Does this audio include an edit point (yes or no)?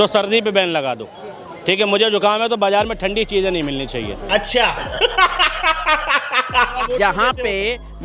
yes